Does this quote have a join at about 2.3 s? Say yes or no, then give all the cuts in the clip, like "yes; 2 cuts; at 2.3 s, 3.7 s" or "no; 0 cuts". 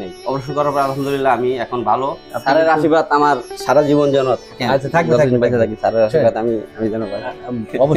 yes; 1 cut; at 2.3 s